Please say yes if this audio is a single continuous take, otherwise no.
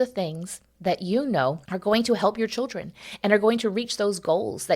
no